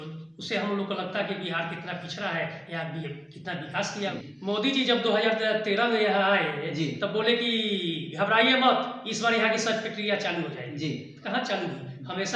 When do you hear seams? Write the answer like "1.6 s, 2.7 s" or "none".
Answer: 4.2 s